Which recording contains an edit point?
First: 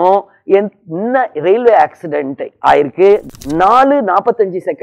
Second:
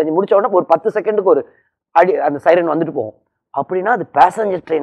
first; 1 cut; at 3.3 s

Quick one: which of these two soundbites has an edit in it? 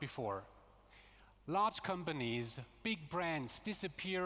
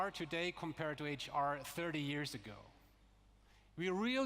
second; 1 cut; at 1.9 s

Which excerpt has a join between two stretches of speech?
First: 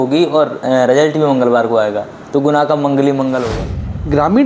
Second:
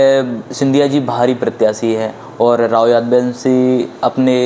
first; 1 cut; at 3.5 s

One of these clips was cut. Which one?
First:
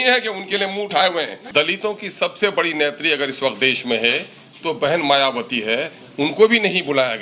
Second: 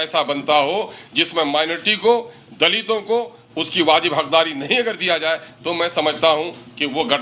first; 1 cut; at 1.4 s

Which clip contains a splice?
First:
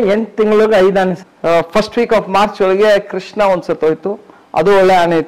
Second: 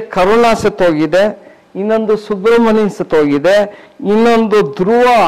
first; 1 cut; at 1.2 s

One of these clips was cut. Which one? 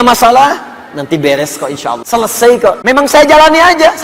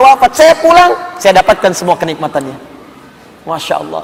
first; 2 cuts; at 2.0 s, 2.8 s

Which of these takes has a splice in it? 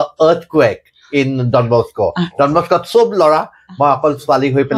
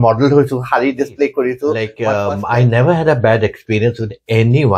second; 1 cut; at 1.9 s

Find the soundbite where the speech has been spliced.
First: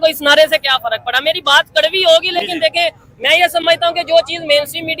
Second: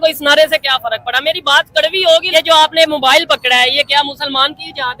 second; 1 cut; at 2.3 s

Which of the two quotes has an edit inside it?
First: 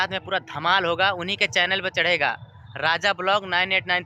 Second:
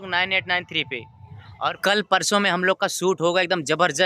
second; 1 cut; at 1.8 s

